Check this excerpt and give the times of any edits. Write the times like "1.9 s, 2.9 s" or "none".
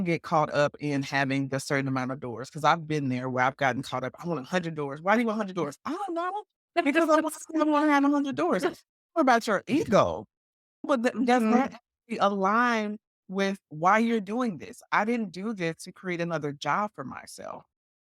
none

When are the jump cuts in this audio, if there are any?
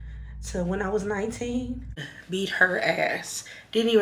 2.0 s

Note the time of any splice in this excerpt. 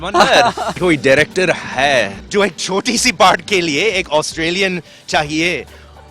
0.8 s, 2.2 s

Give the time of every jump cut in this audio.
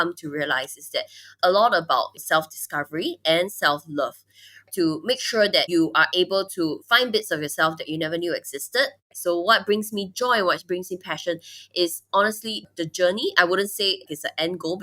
9.1 s

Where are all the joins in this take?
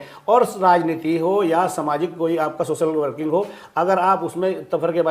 none

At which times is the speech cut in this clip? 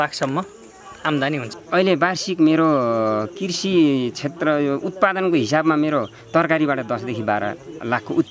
1.5 s

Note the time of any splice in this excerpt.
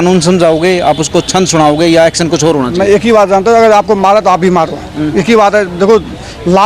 none

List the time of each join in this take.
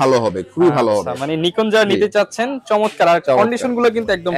none

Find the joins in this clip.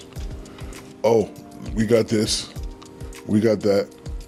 none

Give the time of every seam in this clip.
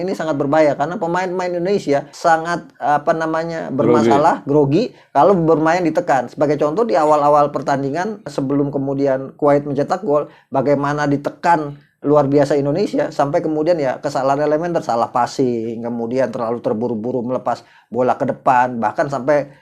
2.1 s, 8.3 s

